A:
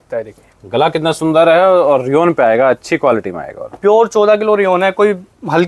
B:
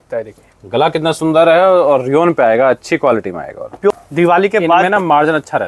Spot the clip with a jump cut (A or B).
B